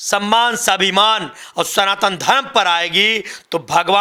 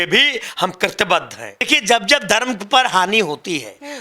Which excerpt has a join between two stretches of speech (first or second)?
second